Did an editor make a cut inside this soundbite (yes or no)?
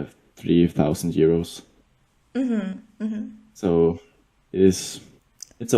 no